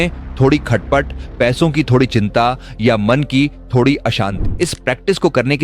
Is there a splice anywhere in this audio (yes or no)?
yes